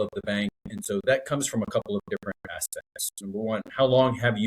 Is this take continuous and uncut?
yes; 0 cuts

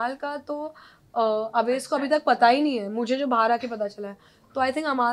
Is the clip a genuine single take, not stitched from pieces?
yes; 0 cuts

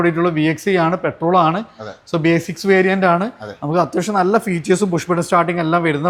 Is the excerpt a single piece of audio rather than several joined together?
yes; 0 cuts

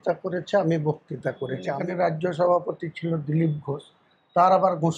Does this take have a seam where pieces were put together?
yes; 1 cut; at 1.7 s

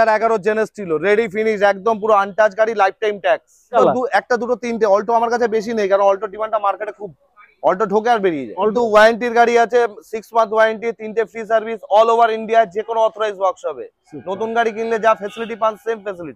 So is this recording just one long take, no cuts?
no; 2 cuts; at 3.7 s, 8.7 s

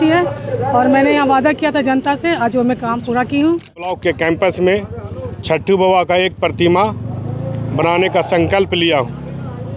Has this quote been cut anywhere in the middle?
yes; 1 cut; at 3.9 s

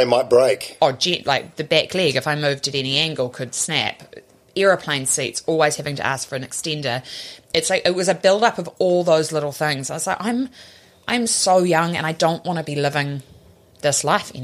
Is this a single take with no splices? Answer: yes; 0 cuts

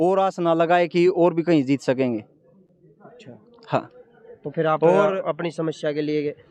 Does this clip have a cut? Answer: no; 0 cuts

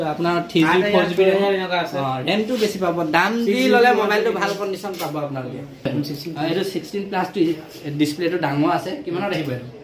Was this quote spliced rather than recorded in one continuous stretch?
yes; 1 cut; at 5.9 s

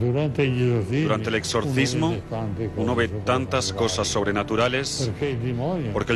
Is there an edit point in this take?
no; 0 cuts

